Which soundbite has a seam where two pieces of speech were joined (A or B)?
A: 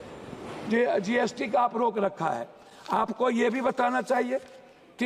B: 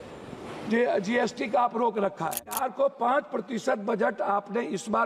B